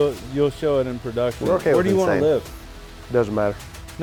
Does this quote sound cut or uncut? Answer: uncut